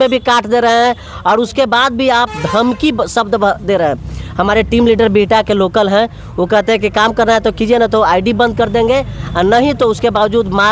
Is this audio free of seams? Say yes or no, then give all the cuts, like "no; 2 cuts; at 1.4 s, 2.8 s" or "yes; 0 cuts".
yes; 0 cuts